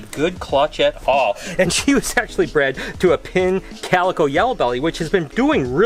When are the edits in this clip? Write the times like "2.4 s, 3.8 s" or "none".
none